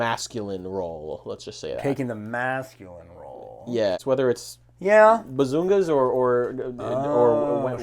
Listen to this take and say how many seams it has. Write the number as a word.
one